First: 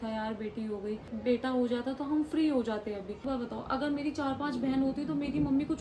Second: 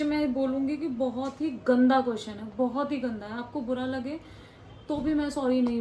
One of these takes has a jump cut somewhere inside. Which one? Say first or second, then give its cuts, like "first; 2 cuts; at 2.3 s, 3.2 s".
first; 2 cuts; at 1.1 s, 3.2 s